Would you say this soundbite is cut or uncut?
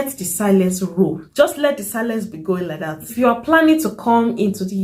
cut